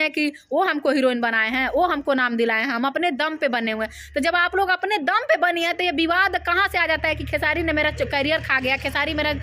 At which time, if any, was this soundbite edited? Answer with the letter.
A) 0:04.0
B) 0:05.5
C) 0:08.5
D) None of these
D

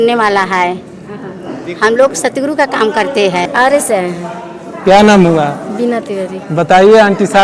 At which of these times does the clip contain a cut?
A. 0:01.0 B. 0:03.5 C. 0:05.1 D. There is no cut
B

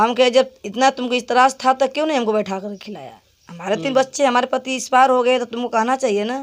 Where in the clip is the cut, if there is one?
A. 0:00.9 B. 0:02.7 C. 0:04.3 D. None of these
D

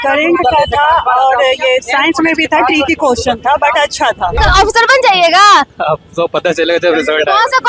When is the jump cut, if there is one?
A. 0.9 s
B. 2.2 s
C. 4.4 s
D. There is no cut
C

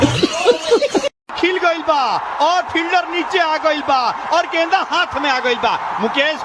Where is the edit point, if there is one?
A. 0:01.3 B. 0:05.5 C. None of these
A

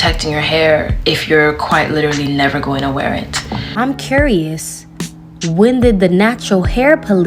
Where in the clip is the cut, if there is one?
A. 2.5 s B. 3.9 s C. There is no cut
B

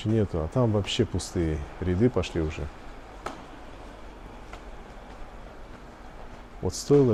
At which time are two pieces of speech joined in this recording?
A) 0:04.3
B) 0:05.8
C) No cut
C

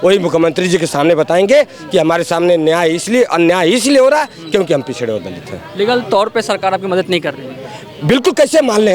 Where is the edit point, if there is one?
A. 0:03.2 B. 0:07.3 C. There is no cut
C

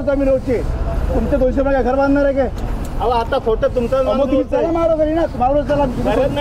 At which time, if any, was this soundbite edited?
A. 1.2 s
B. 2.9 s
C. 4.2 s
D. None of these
D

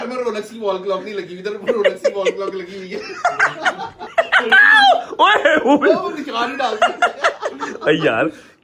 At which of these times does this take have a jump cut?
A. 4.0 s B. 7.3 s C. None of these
A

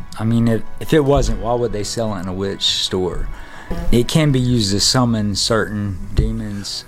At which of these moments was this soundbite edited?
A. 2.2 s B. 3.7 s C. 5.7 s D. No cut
B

